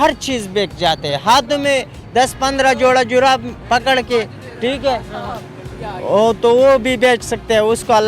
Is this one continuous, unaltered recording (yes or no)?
yes